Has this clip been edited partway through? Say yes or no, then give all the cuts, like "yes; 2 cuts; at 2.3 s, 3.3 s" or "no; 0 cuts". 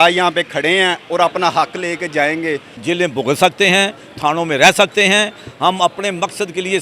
yes; 1 cut; at 2.7 s